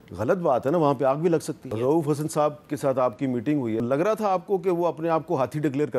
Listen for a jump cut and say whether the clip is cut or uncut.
cut